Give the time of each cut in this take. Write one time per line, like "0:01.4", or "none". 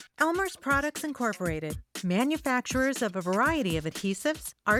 none